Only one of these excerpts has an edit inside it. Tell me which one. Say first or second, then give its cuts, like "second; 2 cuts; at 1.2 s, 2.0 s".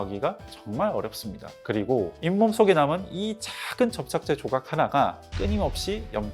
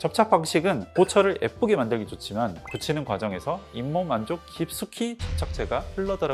first; 1 cut; at 5.3 s